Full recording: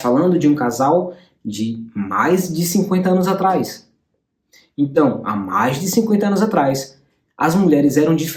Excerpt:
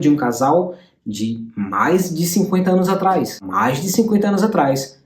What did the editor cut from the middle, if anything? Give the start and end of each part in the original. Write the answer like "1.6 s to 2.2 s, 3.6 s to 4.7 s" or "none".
3.8 s to 5.4 s